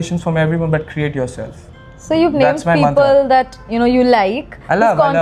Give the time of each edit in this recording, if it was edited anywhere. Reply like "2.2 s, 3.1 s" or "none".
none